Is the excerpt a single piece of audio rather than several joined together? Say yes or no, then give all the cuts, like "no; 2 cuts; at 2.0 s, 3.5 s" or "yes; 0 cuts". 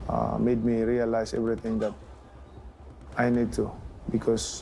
yes; 0 cuts